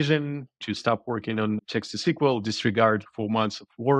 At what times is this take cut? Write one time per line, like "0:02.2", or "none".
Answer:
0:00.7
0:03.1